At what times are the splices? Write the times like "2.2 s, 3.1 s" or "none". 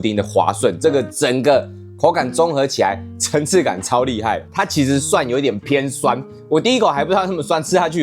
4.5 s

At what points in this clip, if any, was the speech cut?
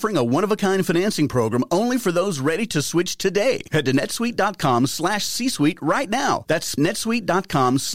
6.7 s

